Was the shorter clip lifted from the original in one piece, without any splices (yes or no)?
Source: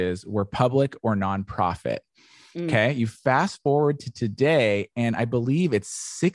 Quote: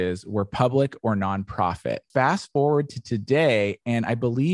no